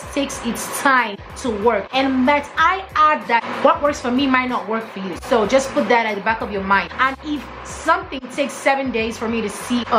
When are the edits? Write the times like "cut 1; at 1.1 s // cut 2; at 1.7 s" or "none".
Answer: none